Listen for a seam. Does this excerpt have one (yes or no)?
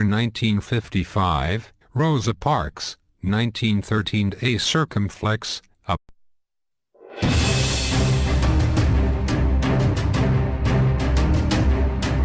no